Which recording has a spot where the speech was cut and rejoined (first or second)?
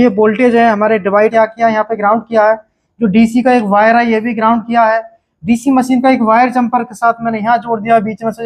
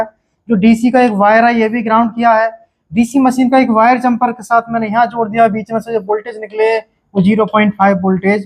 first